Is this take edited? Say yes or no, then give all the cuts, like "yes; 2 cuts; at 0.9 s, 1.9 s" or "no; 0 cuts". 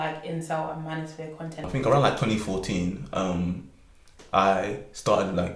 yes; 1 cut; at 1.7 s